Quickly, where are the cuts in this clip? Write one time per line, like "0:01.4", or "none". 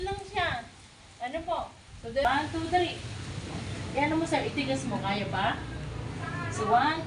0:02.2